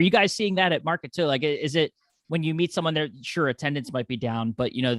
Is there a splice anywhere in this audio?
no; 0 cuts

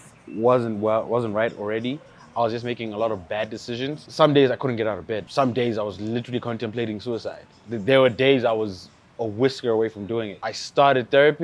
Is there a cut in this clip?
yes; 3 cuts; at 4.0 s, 5.3 s, 10.4 s

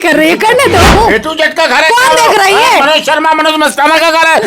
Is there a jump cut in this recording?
yes; 1 cut; at 1.0 s

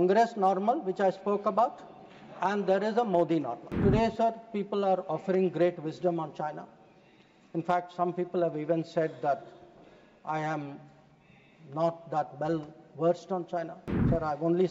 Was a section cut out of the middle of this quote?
yes; 1 cut; at 3.6 s

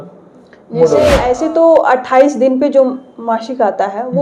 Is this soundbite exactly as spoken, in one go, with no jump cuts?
no; 1 cut; at 1.3 s

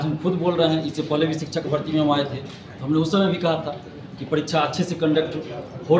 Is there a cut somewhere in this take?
no; 0 cuts

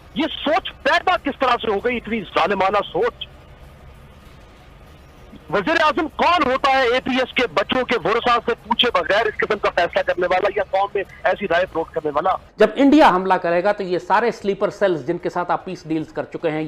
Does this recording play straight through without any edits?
no; 1 cut; at 12.4 s

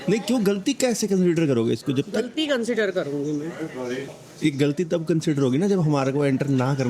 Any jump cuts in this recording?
no; 0 cuts

